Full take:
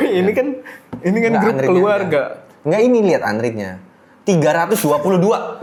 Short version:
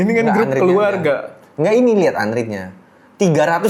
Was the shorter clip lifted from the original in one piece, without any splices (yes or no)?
yes